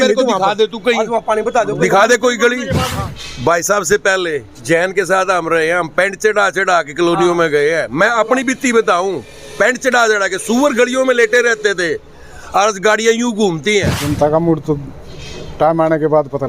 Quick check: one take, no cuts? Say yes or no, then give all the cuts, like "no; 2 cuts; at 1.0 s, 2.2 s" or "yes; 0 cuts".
no; 2 cuts; at 2.9 s, 14.0 s